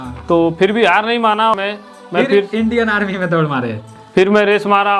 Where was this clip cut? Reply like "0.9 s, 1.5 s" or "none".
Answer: 1.5 s